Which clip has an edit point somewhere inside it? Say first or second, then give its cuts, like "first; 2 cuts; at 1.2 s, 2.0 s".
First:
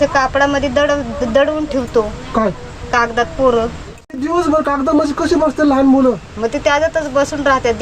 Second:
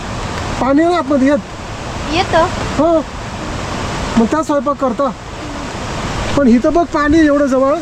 first; 1 cut; at 4.2 s